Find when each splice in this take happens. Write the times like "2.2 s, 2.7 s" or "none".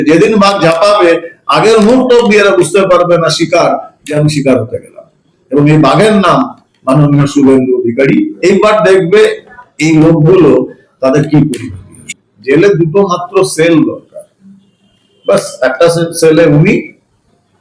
12.1 s